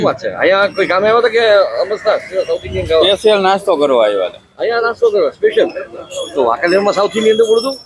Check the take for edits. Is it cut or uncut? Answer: uncut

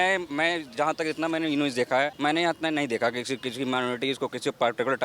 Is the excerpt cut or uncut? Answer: cut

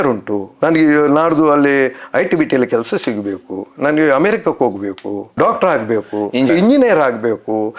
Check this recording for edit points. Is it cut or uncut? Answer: cut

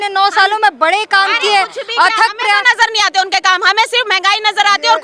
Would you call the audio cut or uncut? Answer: uncut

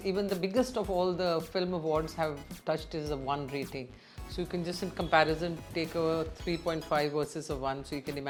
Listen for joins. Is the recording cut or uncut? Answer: uncut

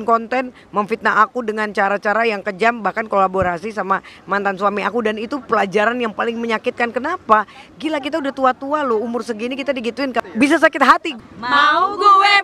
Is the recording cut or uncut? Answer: cut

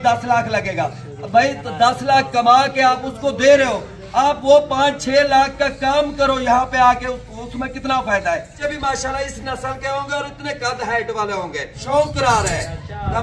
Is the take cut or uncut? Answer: cut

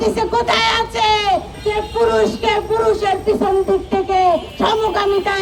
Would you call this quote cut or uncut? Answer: cut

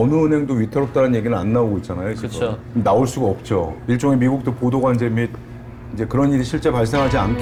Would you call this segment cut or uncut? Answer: uncut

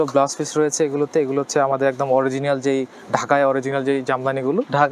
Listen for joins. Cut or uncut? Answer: uncut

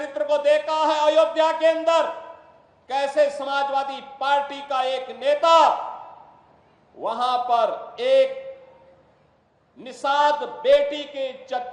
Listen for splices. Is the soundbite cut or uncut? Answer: uncut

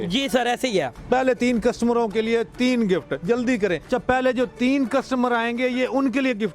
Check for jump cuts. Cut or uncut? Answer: cut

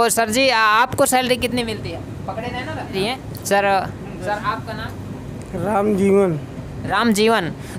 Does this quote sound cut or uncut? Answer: uncut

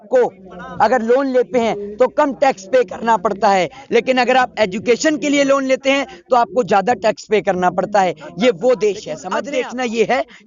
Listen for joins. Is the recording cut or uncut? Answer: cut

